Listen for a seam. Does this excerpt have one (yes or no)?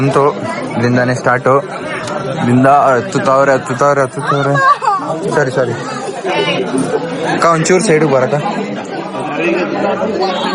no